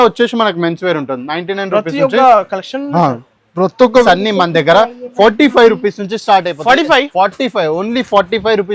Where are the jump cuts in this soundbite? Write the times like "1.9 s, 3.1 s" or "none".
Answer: 4.0 s